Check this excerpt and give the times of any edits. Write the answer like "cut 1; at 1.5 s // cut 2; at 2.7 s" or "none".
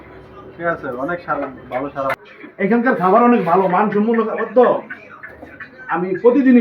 cut 1; at 2.1 s